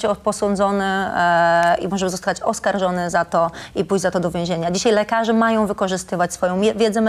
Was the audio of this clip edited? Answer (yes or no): no